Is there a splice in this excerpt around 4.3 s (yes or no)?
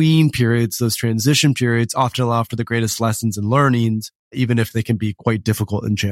yes